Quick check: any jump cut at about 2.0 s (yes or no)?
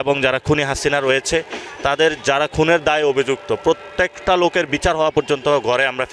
no